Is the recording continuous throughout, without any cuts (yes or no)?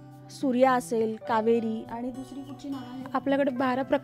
yes